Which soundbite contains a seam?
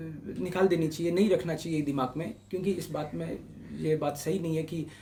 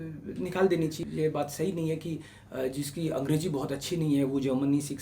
second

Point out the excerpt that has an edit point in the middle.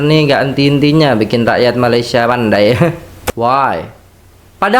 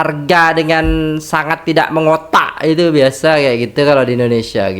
first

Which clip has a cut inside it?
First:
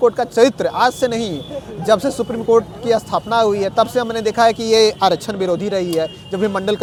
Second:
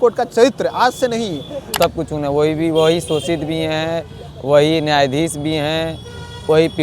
second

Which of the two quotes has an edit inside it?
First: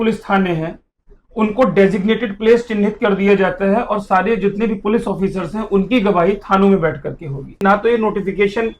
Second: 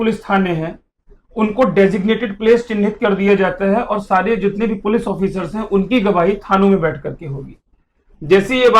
first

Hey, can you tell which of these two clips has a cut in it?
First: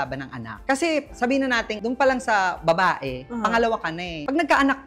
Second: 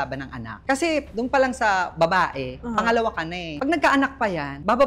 second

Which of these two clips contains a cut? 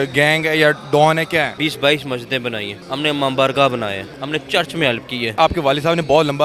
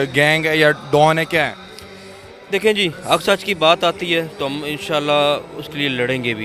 first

